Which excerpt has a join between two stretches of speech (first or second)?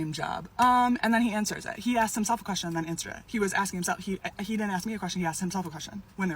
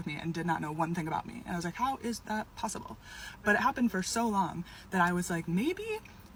first